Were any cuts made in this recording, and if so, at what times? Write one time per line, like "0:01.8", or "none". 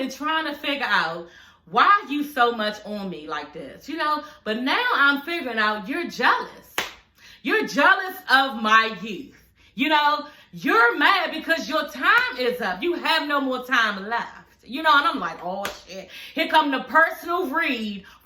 none